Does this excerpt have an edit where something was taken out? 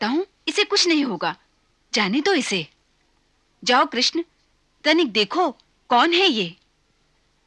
no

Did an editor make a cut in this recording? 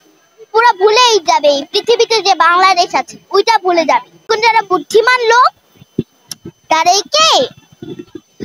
yes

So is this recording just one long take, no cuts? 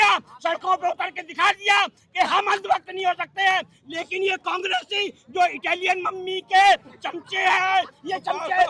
yes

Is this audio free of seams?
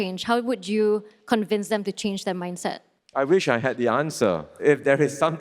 no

